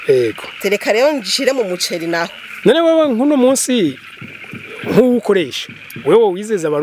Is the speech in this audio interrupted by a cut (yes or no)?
yes